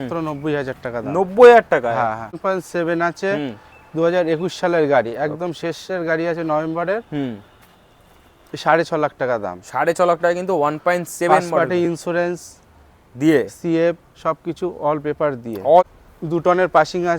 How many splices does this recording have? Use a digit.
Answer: 2